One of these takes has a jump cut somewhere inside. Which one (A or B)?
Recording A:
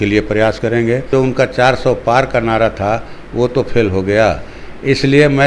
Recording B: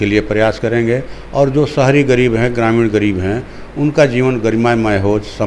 A